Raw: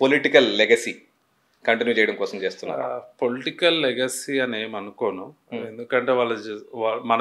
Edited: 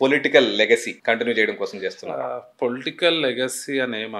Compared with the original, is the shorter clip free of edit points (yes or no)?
no